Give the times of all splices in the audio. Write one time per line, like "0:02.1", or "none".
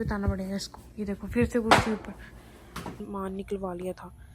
0:03.0